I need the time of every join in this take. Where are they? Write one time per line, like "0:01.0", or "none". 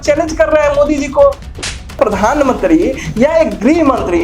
0:01.7